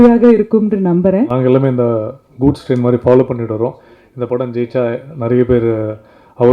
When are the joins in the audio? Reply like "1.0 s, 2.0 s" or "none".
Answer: 1.3 s